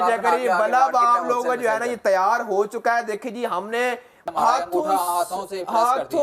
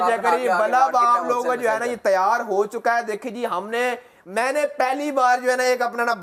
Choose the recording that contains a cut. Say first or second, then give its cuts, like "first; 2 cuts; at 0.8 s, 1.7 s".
first; 1 cut; at 4.3 s